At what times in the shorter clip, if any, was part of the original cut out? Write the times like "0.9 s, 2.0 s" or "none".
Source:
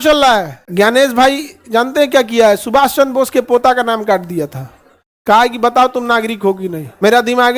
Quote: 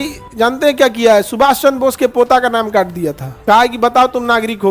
3.3 s